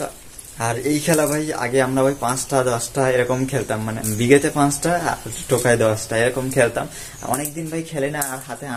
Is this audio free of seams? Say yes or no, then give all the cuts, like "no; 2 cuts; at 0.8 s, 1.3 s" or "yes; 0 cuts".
no; 1 cut; at 4.1 s